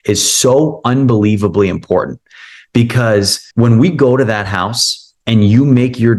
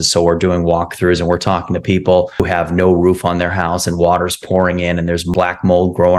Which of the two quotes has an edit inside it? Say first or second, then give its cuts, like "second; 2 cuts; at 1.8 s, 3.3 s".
second; 2 cuts; at 2.4 s, 5.3 s